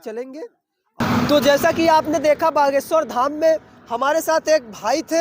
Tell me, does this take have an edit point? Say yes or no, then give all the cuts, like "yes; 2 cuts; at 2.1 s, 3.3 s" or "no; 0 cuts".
yes; 1 cut; at 1.0 s